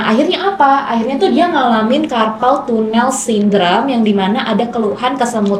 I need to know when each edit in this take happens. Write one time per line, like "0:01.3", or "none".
none